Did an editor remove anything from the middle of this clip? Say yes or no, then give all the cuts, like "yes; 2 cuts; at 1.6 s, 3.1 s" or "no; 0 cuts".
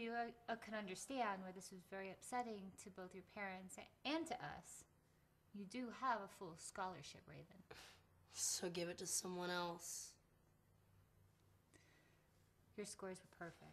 yes; 1 cut; at 2.0 s